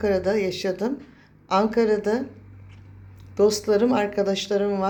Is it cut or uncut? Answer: uncut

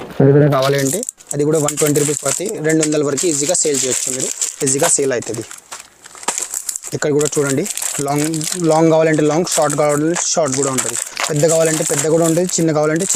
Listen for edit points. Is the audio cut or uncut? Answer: uncut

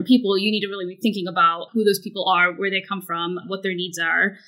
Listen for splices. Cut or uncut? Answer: uncut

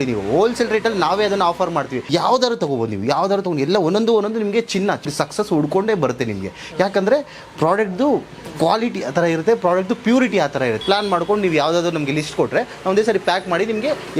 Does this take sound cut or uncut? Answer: cut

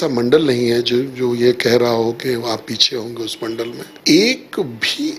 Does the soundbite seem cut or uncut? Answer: cut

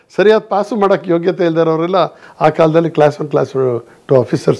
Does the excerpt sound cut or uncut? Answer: uncut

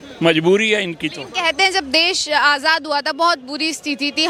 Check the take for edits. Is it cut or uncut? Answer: uncut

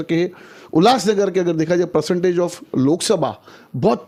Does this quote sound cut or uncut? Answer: uncut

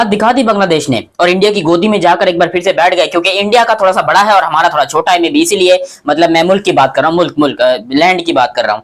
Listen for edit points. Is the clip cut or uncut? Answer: uncut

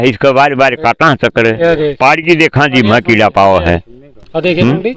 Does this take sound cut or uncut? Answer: uncut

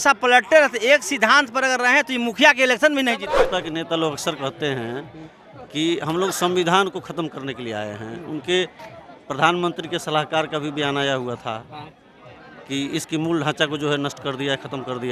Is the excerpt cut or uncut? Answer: cut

